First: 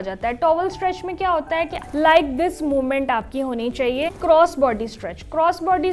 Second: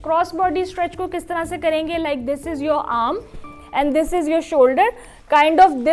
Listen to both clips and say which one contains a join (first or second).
first